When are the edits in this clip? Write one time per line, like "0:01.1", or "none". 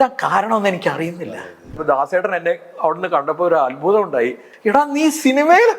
0:01.8
0:04.5